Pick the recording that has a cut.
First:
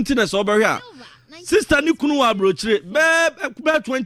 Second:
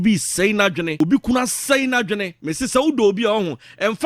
second; 2 cuts; at 1.0 s, 2.3 s

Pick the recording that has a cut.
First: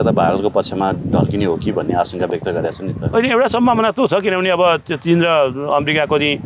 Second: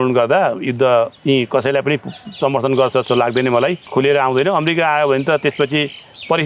second; 2 cuts; at 1.2 s, 3.8 s

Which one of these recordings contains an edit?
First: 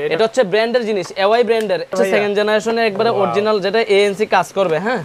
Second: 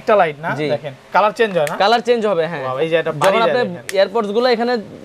first; 1 cut; at 1.9 s

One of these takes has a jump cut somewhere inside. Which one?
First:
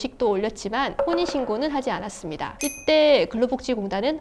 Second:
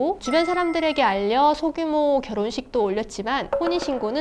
first; 1 cut; at 2.6 s

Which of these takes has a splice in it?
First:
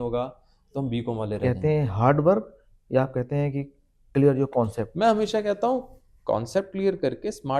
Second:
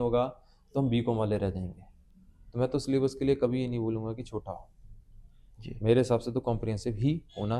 first; 2 cuts; at 1.4 s, 4.8 s

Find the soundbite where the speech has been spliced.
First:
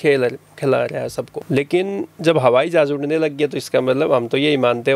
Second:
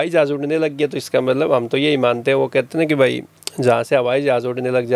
first; 1 cut; at 1.4 s

